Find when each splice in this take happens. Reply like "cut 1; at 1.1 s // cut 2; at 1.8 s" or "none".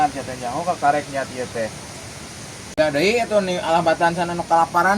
cut 1; at 2.8 s